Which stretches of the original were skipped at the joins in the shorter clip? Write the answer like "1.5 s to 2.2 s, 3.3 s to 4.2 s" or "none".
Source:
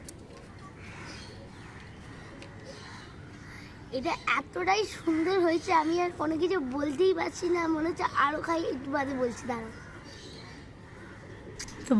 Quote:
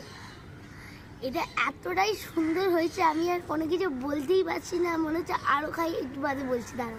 none